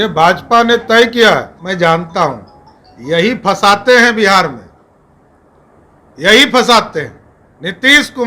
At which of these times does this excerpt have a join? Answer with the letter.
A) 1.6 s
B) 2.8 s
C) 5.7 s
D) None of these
A